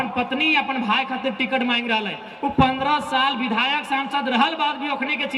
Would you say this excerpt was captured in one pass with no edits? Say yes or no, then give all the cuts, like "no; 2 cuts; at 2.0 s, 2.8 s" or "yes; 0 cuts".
yes; 0 cuts